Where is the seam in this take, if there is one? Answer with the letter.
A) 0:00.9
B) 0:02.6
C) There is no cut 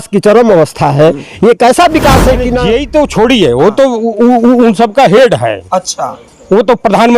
B